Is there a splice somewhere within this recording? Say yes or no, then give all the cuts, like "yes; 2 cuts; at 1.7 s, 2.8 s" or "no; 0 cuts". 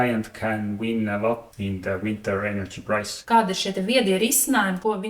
yes; 2 cuts; at 1.5 s, 3.1 s